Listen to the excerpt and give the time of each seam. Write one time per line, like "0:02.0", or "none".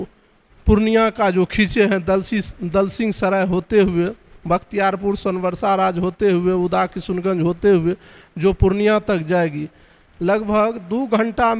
none